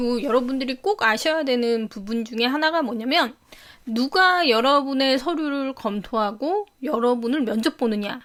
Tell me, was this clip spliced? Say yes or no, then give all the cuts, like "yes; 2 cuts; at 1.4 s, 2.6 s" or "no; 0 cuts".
no; 0 cuts